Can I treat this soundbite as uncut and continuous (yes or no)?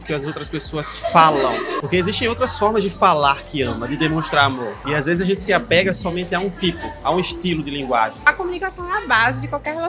no